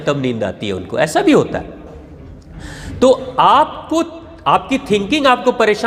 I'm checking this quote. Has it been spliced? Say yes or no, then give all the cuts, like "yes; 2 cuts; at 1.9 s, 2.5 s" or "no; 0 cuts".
no; 0 cuts